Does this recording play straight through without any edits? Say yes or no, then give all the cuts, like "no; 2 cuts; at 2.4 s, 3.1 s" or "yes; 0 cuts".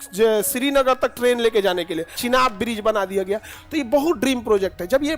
no; 1 cut; at 2.2 s